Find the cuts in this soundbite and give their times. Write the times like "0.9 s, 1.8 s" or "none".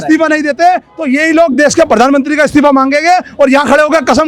none